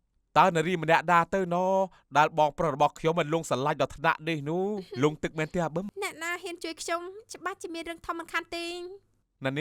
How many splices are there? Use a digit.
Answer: 1